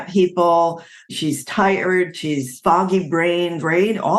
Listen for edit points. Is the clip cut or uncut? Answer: cut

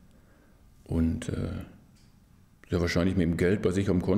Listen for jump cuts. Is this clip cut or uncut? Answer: uncut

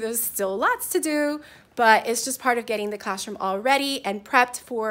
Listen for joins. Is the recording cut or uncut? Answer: uncut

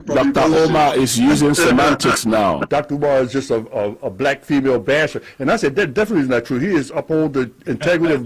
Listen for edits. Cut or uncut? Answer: cut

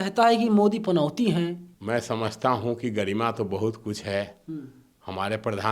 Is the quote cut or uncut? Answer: cut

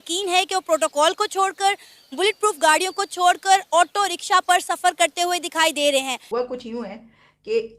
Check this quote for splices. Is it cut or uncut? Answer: cut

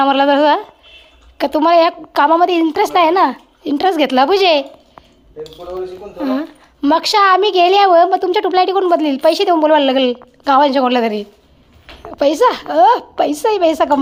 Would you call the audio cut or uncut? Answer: uncut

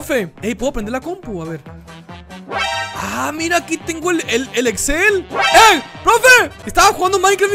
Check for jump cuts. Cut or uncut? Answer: cut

